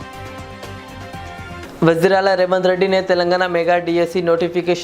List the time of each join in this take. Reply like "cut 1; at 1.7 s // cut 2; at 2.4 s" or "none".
cut 1; at 1.6 s

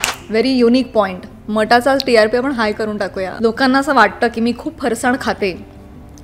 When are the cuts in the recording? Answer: cut 1; at 3.3 s

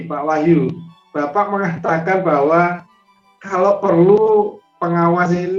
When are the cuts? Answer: none

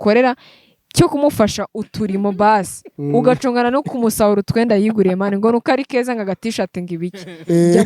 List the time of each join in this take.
none

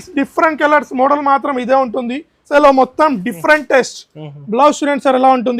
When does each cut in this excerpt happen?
cut 1; at 2.4 s

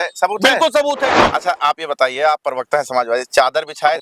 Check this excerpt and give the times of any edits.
cut 1; at 1.2 s

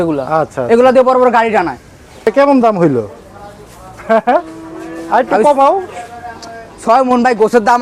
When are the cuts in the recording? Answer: cut 1; at 2.2 s

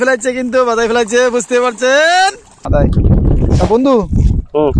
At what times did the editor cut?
cut 1; at 2.6 s

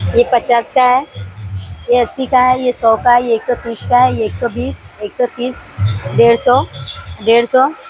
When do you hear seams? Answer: none

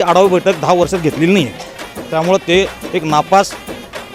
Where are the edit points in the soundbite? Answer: cut 1; at 1.6 s

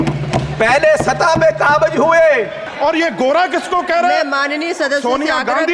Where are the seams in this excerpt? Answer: cut 1; at 2.7 s

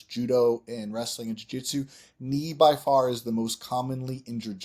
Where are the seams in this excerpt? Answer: none

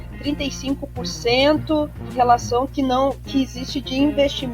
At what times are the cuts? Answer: cut 1; at 2.0 s

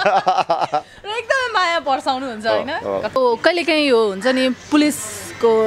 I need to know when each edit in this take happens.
cut 1; at 3.2 s

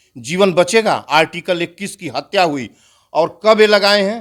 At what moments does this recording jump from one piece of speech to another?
none

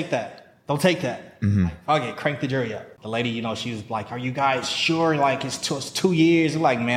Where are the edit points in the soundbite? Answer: cut 1; at 2.9 s

